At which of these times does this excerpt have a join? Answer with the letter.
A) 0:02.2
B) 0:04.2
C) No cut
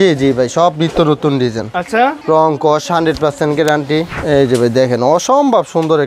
B